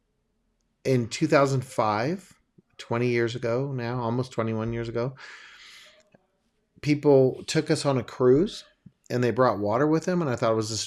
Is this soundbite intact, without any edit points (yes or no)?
yes